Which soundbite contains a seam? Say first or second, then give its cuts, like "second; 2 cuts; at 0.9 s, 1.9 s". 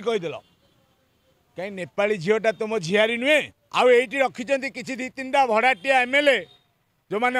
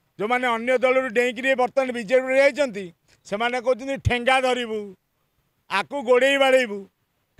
first; 1 cut; at 3.6 s